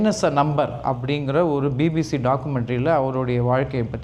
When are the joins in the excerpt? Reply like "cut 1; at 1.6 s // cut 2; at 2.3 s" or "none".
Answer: none